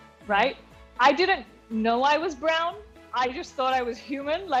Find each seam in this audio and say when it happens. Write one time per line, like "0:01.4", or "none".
none